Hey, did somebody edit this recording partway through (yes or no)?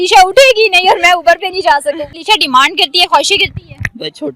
yes